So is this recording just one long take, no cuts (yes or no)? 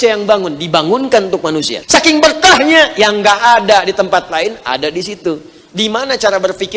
no